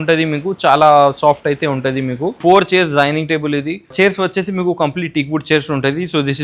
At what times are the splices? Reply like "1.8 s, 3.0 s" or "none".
2.4 s, 3.9 s